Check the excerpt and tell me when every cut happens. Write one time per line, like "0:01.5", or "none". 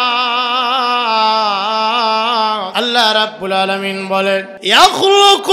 0:02.7
0:04.5